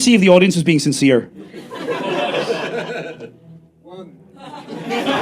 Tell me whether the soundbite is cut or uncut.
uncut